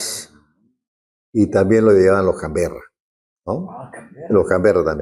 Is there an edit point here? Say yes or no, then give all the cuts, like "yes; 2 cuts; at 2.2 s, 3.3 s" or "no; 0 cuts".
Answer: no; 0 cuts